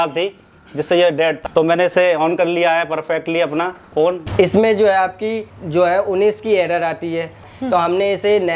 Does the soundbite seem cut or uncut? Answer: cut